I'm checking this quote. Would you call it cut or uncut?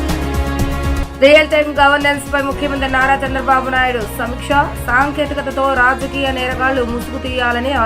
cut